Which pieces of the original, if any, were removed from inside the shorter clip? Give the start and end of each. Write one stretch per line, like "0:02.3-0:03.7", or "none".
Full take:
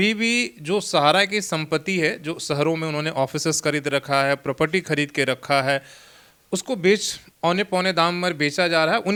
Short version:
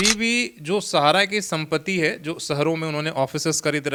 none

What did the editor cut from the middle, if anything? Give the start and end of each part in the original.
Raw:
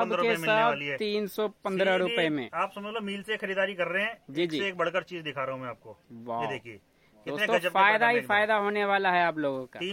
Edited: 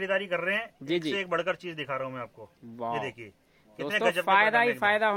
none

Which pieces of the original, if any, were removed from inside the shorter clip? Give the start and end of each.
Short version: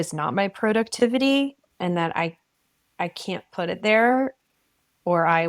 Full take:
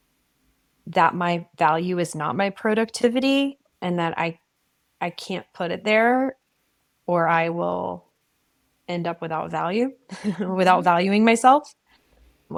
none

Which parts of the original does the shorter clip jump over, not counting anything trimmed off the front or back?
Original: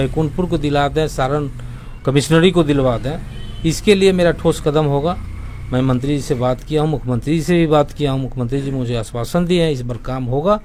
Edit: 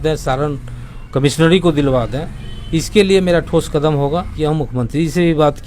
0:05.2-0:06.6

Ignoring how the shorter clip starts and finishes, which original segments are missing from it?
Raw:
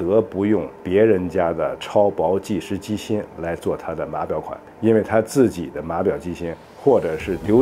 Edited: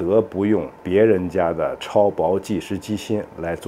none

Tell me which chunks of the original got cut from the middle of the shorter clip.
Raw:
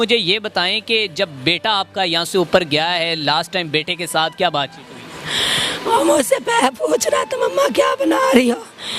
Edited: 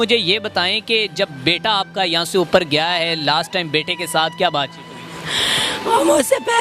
none

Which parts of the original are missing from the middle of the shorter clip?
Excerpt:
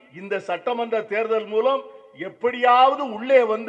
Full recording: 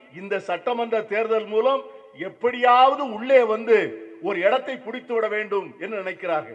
none

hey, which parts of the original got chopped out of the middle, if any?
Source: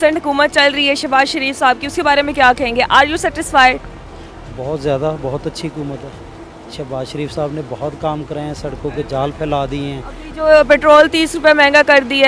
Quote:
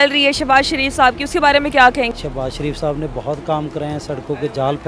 0:02.7-0:06.6

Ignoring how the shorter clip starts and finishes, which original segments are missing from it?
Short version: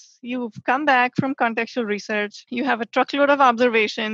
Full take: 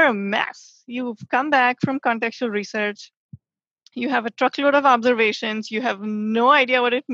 0:03.0-0:03.8

